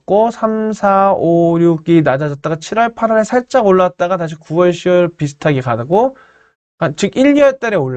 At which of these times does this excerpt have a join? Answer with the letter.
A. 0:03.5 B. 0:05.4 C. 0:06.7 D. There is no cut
D